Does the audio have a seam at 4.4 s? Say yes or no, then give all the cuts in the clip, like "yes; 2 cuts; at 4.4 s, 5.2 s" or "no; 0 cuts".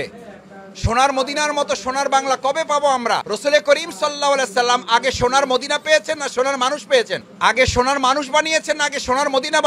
no; 0 cuts